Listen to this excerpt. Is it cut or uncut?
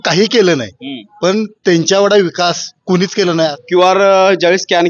cut